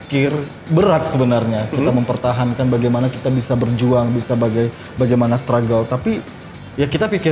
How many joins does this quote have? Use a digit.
0